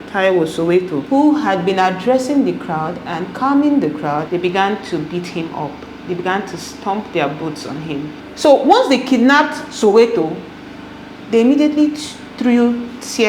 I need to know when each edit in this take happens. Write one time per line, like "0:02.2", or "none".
0:01.0
0:04.2
0:08.2

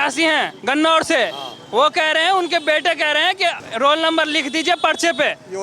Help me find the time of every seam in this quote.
0:03.6

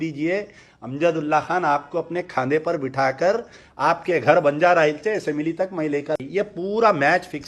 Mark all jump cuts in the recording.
0:06.2

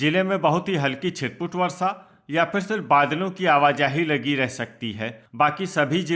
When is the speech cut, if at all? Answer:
none

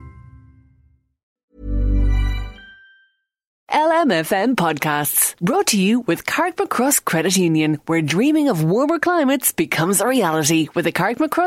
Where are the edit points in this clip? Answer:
0:01.3
0:03.6

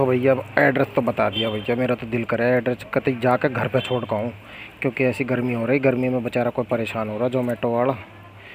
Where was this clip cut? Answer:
none

